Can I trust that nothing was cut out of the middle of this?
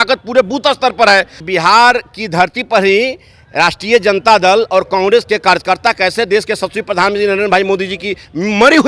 no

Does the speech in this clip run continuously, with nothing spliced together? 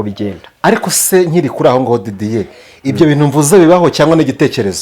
yes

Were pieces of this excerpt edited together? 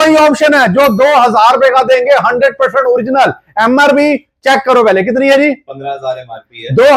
no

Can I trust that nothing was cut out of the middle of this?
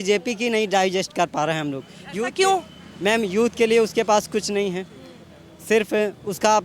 yes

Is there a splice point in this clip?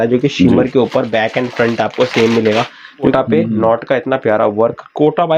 yes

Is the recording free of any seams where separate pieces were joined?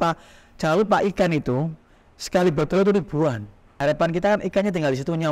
no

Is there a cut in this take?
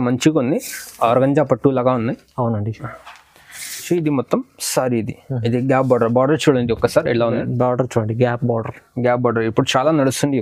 yes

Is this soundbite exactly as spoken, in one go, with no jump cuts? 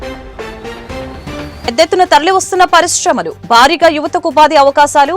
no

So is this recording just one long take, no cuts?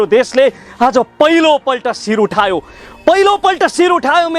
yes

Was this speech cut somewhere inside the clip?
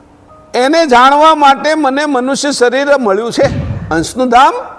yes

